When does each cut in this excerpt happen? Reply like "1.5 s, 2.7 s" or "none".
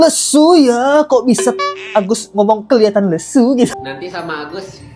3.7 s